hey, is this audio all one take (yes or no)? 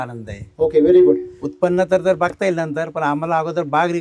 yes